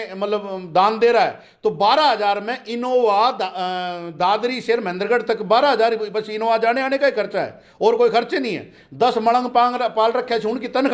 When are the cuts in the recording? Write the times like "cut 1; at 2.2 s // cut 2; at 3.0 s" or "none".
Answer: none